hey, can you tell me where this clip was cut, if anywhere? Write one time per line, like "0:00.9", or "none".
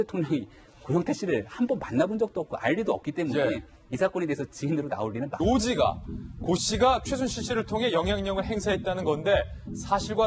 none